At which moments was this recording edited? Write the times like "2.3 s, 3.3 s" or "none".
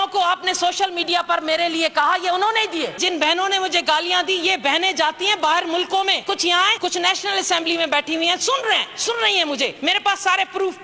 3.0 s, 6.6 s, 9.8 s